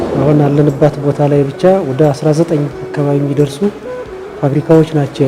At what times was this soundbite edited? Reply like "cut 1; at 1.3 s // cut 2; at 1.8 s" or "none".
none